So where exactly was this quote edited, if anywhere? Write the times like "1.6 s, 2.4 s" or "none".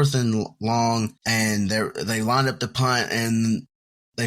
1.2 s